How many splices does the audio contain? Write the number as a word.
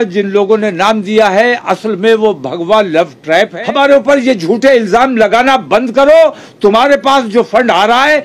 one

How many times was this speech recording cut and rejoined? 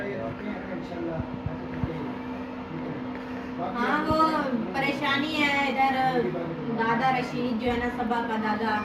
zero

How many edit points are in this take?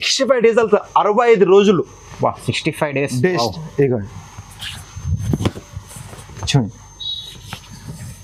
zero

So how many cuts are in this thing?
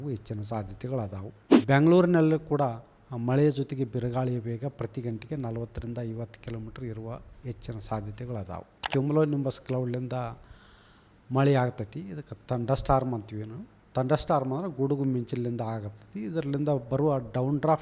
two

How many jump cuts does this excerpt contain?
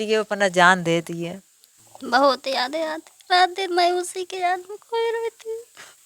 one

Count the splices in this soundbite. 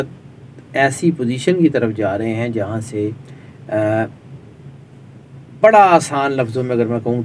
zero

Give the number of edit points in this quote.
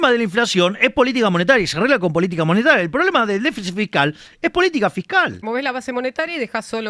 one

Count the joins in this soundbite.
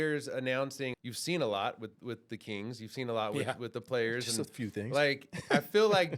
one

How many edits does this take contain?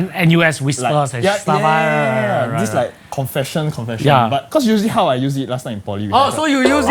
one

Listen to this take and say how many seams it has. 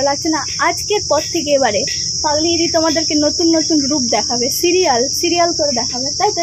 zero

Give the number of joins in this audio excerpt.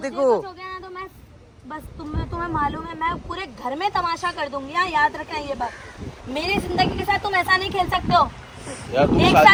zero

